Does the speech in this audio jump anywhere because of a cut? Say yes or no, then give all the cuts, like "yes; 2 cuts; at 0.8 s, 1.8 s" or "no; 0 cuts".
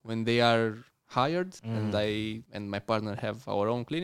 yes; 2 cuts; at 1.6 s, 2.5 s